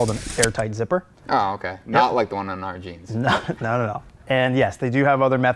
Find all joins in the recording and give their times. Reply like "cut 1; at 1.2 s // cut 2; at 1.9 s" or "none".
cut 1; at 1.1 s // cut 2; at 4.2 s